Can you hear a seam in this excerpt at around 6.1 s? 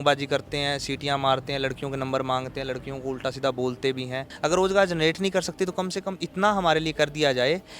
no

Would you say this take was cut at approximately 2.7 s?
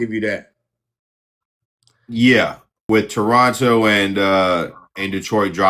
yes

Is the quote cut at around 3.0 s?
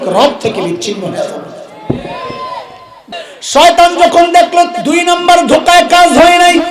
yes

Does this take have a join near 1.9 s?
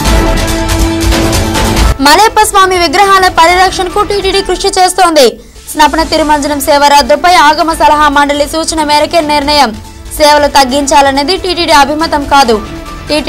yes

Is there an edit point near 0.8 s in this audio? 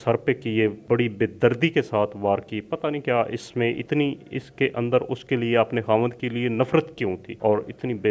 yes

